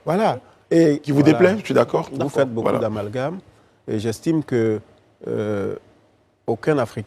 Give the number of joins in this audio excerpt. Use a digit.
1